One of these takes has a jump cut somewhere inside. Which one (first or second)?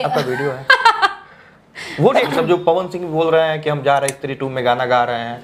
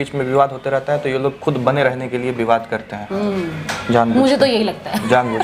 first